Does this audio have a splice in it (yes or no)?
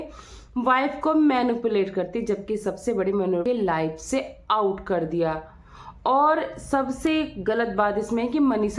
yes